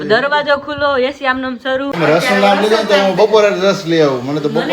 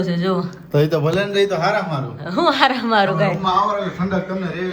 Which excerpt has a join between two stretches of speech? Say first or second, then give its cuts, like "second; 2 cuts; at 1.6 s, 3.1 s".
first; 1 cut; at 1.9 s